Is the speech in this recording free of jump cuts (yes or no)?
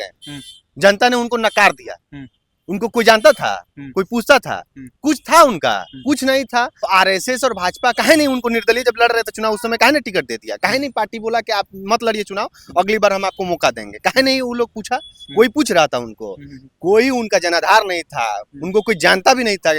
no